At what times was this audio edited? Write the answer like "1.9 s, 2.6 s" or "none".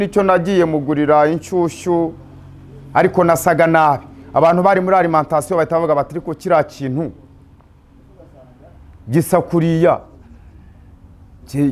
none